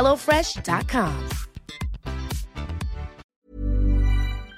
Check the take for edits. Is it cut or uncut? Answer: cut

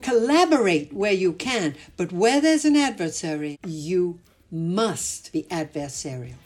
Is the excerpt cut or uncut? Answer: cut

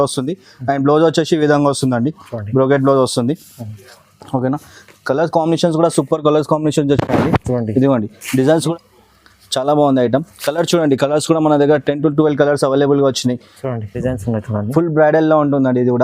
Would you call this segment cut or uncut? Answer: cut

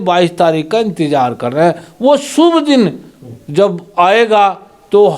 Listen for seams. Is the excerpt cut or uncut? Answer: uncut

